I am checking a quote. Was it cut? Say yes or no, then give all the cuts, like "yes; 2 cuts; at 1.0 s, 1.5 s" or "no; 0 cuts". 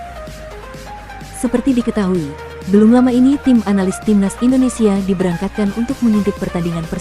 yes; 1 cut; at 1.4 s